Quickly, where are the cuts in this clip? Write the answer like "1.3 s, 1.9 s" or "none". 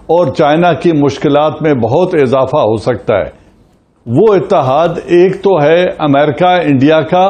none